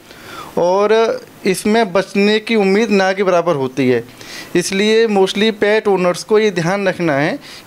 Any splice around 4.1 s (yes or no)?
no